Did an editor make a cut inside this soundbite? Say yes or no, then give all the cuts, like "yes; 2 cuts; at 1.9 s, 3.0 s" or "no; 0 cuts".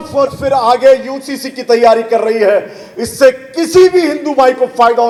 no; 0 cuts